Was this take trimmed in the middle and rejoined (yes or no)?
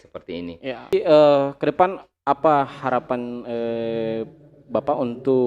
yes